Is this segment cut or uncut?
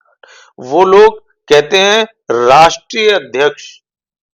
uncut